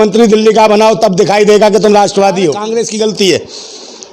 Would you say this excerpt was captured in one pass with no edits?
no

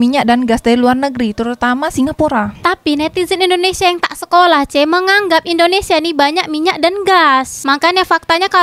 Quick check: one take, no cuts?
yes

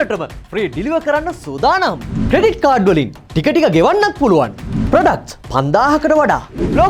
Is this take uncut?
yes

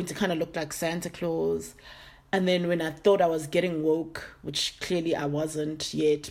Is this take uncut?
yes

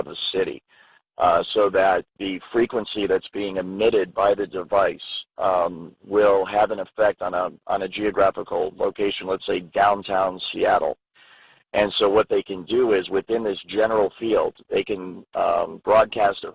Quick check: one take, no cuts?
yes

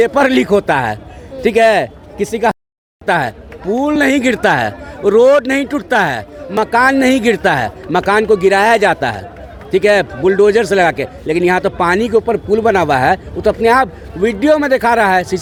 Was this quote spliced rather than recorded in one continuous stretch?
no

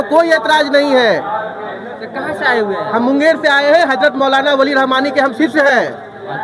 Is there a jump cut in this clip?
no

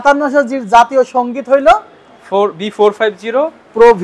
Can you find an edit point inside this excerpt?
no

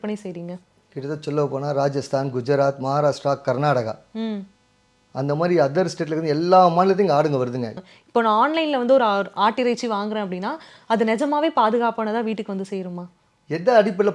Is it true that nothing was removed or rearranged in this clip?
no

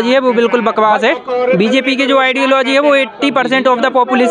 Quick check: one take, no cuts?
yes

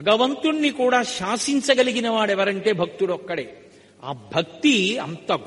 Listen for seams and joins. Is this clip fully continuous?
yes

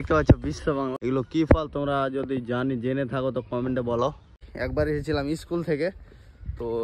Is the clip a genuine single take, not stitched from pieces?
no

